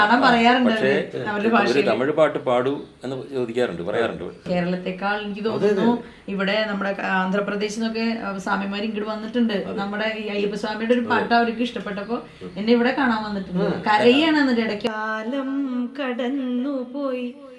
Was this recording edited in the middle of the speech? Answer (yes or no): yes